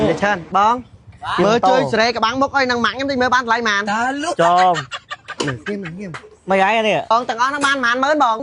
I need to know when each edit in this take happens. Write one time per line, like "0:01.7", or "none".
0:07.0